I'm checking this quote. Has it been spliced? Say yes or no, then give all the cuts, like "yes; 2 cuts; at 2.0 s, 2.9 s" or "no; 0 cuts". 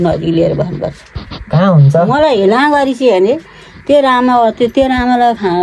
no; 0 cuts